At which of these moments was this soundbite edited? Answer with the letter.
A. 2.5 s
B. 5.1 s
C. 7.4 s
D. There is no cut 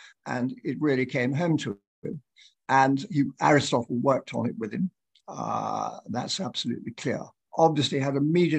C